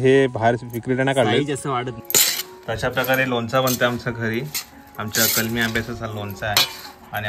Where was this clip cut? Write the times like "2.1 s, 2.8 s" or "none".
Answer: 2.0 s